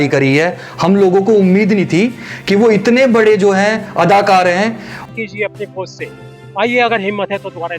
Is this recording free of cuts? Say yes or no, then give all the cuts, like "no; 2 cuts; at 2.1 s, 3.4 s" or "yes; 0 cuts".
no; 1 cut; at 5.1 s